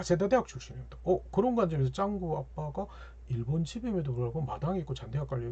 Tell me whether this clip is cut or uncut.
uncut